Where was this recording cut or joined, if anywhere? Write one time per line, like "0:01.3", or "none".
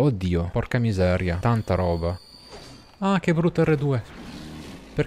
none